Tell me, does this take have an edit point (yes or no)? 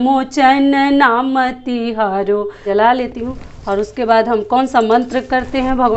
yes